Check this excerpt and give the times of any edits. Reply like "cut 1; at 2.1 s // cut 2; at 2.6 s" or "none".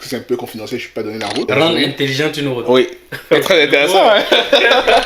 cut 1; at 1.4 s